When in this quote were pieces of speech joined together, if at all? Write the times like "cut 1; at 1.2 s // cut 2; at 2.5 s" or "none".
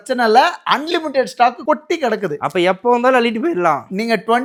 none